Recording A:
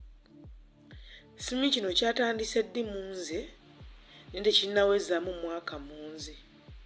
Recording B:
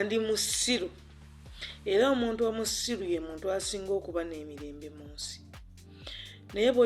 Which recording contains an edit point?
A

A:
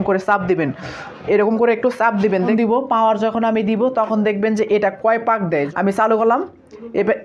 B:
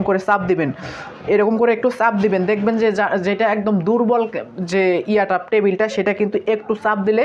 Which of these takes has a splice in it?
A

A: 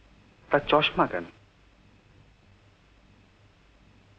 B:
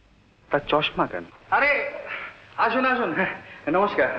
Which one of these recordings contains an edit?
B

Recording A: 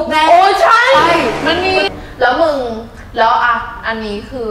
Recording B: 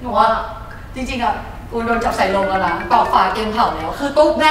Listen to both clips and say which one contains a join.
A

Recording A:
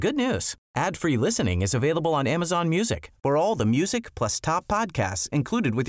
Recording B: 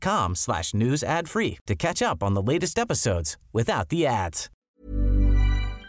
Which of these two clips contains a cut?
B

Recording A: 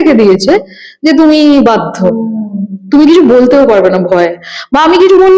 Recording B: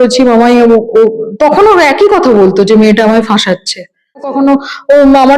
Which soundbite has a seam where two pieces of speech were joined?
B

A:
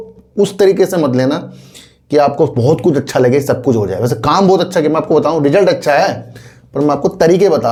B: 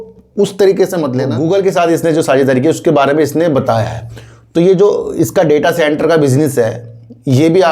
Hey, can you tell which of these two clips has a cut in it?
B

